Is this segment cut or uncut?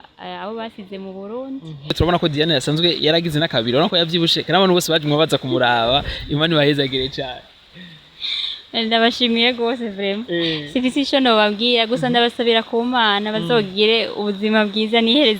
cut